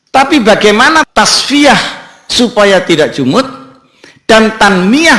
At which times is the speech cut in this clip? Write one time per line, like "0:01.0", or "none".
0:01.1